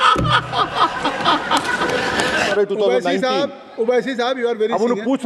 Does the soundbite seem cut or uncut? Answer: cut